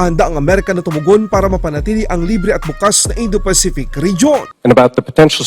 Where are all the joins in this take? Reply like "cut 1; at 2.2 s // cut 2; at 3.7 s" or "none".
cut 1; at 4.4 s

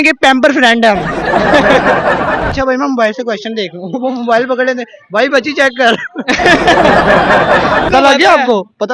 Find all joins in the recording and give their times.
cut 1; at 2.5 s // cut 2; at 7.9 s

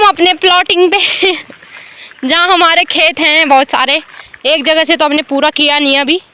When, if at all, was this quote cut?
none

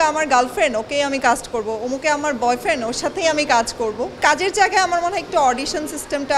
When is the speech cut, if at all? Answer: cut 1; at 4.2 s

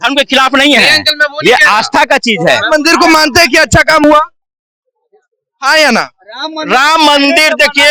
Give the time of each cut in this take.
none

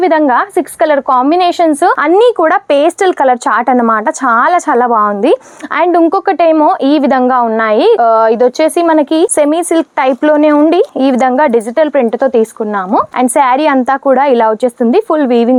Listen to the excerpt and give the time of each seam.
none

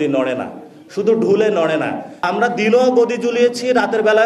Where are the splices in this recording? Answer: cut 1; at 2.1 s

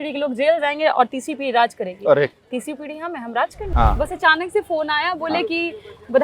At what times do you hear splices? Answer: cut 1; at 2.4 s // cut 2; at 3.6 s

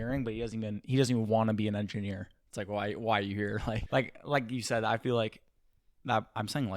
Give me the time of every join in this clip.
cut 1; at 3.8 s

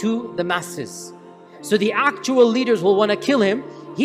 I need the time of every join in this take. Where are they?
cut 1; at 1.5 s

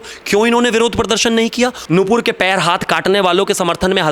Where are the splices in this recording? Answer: cut 1; at 1.8 s

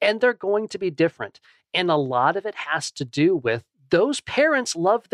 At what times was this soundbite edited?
cut 1; at 3.7 s

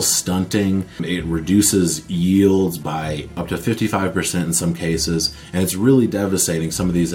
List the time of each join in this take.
cut 1; at 1.0 s // cut 2; at 3.3 s

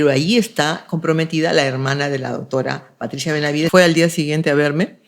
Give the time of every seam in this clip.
cut 1; at 3.7 s

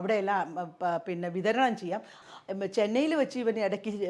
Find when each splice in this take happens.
cut 1; at 2.1 s

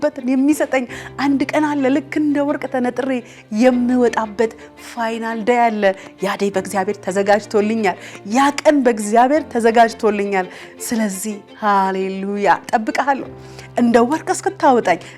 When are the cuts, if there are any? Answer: none

